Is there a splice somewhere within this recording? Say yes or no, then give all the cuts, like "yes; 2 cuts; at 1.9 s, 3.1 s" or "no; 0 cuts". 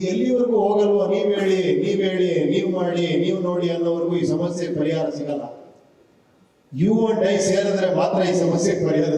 no; 0 cuts